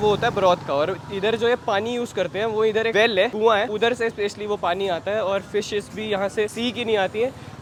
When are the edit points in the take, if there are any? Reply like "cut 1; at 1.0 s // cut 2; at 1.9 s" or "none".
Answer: none